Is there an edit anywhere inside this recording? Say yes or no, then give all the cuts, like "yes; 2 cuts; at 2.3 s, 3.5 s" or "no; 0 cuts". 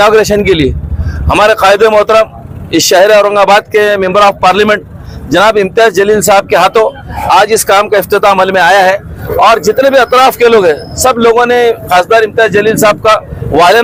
no; 0 cuts